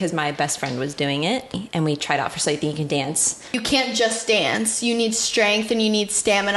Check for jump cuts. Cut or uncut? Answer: cut